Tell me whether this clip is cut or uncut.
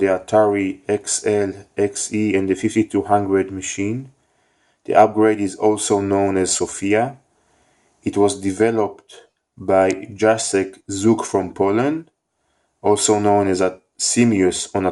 cut